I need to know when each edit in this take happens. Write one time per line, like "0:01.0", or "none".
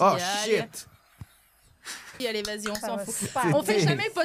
0:02.2